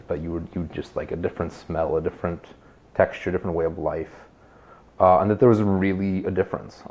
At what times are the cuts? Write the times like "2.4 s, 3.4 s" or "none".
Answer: none